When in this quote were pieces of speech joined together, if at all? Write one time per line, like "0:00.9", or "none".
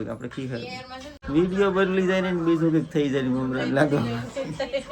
0:01.1